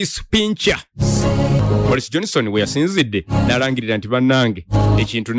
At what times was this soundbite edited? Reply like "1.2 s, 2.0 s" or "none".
1.6 s